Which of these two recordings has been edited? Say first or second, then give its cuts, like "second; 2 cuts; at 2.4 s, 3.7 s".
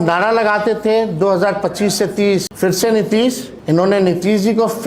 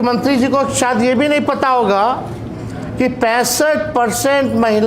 first; 2 cuts; at 2.5 s, 3.5 s